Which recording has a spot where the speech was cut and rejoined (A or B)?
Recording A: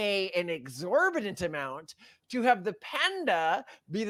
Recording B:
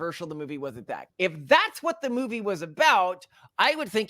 B